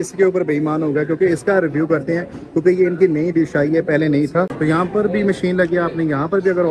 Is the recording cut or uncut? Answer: cut